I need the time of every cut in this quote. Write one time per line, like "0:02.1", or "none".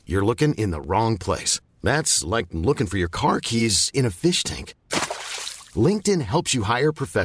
none